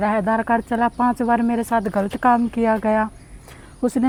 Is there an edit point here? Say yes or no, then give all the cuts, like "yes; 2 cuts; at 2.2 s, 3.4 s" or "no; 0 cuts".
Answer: no; 0 cuts